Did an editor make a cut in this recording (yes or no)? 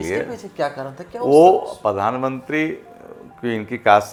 no